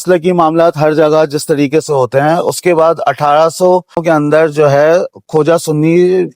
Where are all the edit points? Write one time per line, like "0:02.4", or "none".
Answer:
0:04.0